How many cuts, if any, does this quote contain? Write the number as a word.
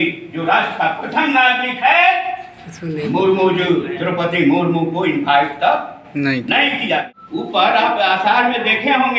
one